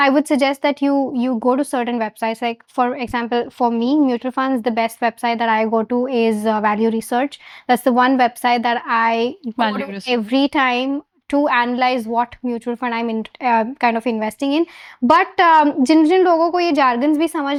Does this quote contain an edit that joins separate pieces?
no; 0 cuts

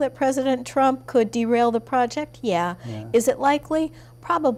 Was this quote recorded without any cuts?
yes; 0 cuts

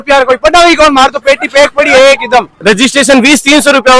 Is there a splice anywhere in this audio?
yes; 1 cut; at 2.5 s

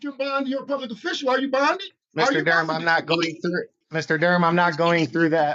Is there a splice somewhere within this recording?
yes; 2 cuts; at 2.0 s, 3.8 s

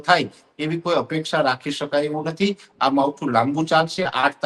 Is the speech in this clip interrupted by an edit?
no; 0 cuts

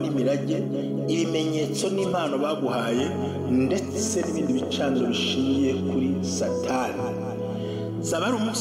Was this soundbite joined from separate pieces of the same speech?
no; 0 cuts

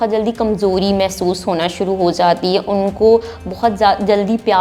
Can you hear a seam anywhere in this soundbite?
no; 0 cuts

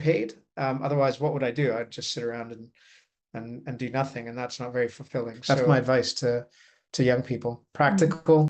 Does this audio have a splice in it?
yes; 1 cut; at 5.7 s

